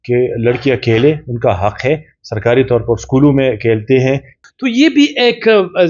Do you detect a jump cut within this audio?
yes; 1 cut; at 4.3 s

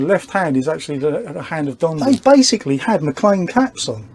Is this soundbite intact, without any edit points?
no; 1 cut; at 2.0 s

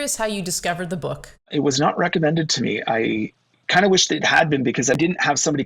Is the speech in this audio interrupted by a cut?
yes; 2 cuts; at 1.5 s, 5.0 s

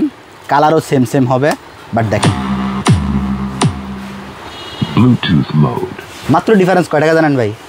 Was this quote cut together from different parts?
no; 0 cuts

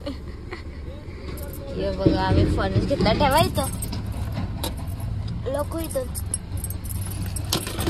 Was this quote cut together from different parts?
no; 0 cuts

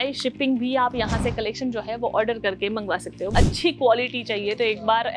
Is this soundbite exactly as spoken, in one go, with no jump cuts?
no; 1 cut; at 3.3 s

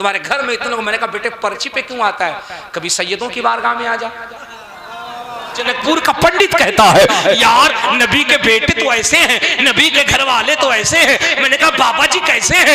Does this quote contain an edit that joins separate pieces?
yes; 1 cut; at 5.6 s

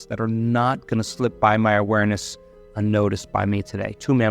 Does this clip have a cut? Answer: no; 0 cuts

